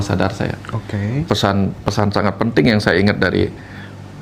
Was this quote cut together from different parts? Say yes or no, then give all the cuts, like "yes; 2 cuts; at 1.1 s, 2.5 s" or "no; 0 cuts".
yes; 1 cut; at 1.3 s